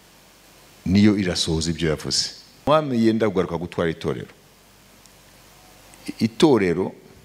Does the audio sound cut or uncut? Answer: cut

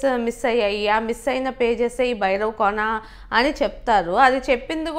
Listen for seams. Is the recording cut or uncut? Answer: uncut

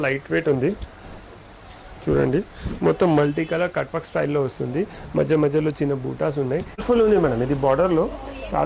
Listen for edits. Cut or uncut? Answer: cut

